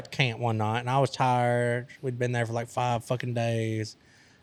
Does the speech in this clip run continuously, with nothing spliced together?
yes; 0 cuts

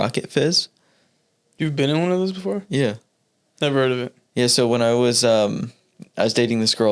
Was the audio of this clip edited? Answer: no; 0 cuts

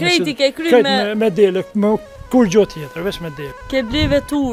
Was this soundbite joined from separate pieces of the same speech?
no; 0 cuts

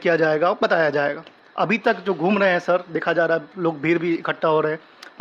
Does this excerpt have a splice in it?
no; 0 cuts

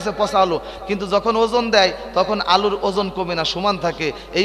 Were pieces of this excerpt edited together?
no; 0 cuts

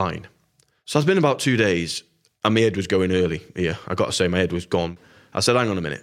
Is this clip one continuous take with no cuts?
no; 1 cut; at 4.9 s

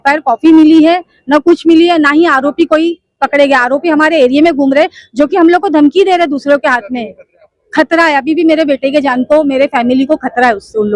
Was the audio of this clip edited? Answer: no; 0 cuts

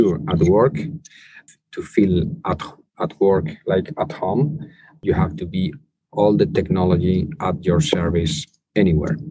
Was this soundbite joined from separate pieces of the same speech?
yes; 2 cuts; at 1.4 s, 4.9 s

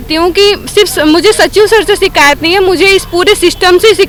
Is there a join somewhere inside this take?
no; 0 cuts

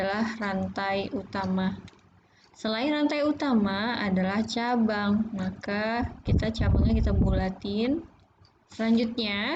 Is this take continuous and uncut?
no; 1 cut; at 8.7 s

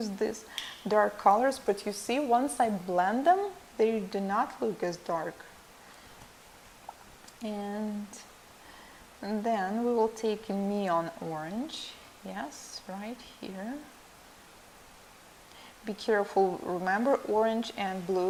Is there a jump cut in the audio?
no; 0 cuts

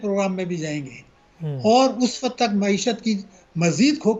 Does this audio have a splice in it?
no; 0 cuts

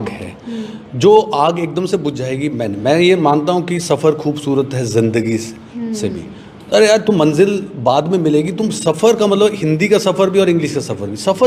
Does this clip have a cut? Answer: no; 0 cuts

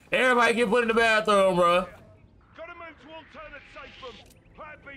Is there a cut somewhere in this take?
yes; 1 cut; at 2.1 s

